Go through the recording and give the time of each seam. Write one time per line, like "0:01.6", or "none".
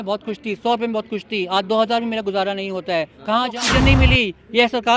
0:03.6